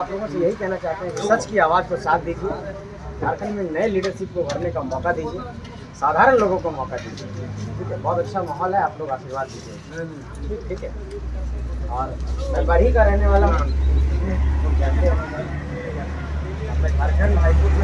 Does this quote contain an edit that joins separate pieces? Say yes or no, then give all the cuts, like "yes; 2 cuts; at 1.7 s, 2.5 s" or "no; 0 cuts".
no; 0 cuts